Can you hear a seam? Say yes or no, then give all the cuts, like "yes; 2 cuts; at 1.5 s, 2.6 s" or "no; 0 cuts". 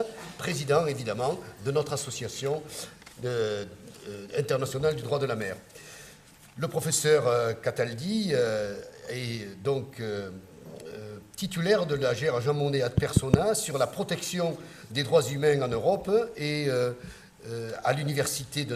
no; 0 cuts